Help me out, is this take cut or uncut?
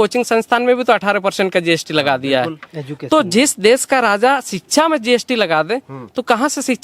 uncut